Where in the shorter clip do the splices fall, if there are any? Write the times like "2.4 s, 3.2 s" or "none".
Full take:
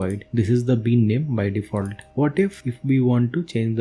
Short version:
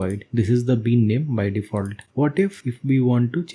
none